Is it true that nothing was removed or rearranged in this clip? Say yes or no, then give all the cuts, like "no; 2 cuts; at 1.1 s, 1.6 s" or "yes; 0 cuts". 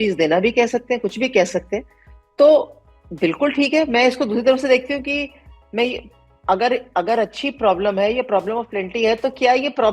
yes; 0 cuts